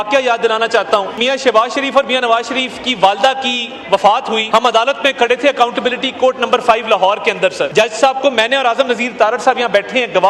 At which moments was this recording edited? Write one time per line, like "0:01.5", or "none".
0:01.2
0:04.4
0:07.7